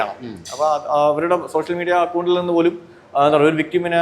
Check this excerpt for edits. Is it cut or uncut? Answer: uncut